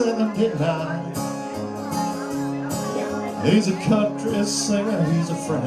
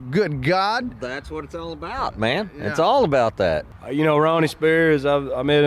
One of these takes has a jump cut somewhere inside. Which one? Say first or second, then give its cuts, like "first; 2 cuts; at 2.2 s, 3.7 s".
second; 1 cut; at 3.7 s